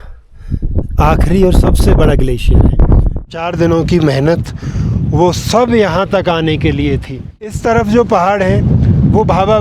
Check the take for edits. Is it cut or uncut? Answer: cut